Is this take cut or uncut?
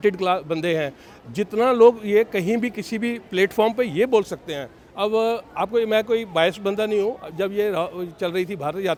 uncut